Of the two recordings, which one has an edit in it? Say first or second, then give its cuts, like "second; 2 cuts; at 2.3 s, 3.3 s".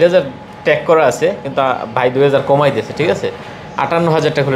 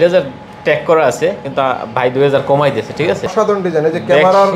second; 1 cut; at 3.3 s